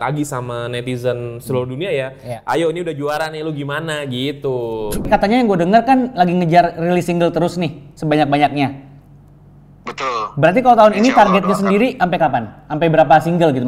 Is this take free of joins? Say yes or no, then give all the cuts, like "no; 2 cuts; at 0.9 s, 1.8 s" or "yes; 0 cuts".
no; 1 cut; at 5.1 s